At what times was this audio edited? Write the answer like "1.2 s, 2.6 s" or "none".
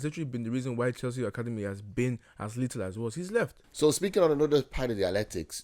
3.6 s